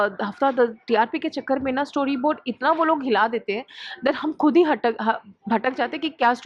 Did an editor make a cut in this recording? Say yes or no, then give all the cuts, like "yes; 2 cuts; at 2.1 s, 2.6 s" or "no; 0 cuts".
no; 0 cuts